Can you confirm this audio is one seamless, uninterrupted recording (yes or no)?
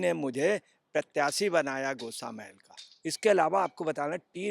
no